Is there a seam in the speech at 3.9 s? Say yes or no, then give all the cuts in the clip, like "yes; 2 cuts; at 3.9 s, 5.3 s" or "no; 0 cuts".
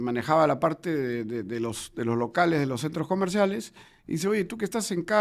no; 0 cuts